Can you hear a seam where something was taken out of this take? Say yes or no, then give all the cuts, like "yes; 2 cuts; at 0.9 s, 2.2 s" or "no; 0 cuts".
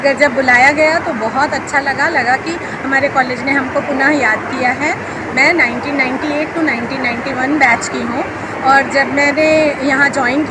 no; 0 cuts